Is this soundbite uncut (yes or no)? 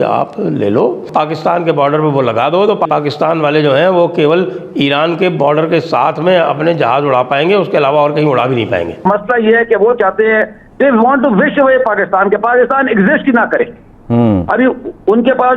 no